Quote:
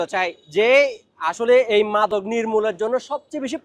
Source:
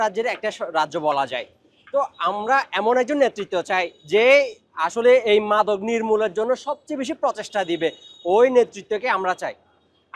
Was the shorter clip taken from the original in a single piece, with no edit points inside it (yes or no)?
yes